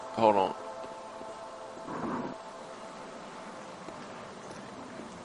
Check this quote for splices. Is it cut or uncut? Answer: cut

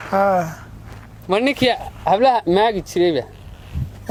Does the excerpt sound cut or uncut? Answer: uncut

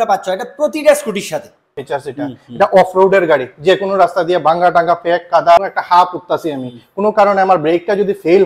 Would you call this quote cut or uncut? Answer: cut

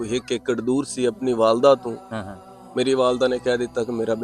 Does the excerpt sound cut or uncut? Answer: uncut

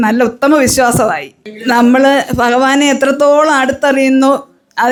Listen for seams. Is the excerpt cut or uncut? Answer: uncut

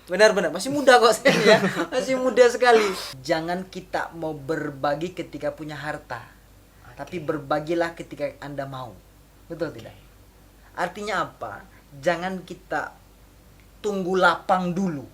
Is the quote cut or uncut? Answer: cut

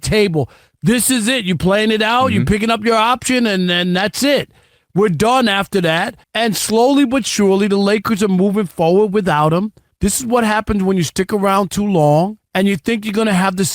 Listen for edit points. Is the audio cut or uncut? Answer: cut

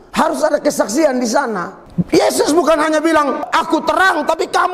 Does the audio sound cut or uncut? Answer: cut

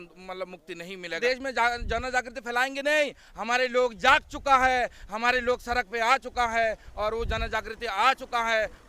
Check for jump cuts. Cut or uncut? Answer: cut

